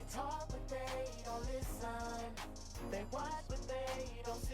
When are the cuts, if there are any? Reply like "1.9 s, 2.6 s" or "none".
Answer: none